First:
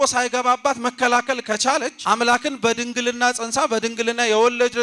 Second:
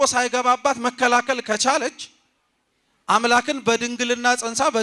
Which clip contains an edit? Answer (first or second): first